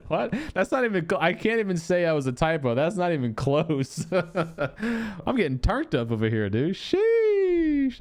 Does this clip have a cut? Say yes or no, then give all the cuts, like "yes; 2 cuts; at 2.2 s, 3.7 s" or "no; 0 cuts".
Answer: no; 0 cuts